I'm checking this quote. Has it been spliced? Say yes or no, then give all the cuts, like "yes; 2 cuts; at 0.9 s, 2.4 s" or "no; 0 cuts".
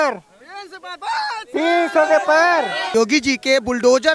yes; 1 cut; at 2.9 s